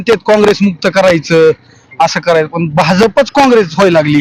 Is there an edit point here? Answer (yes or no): no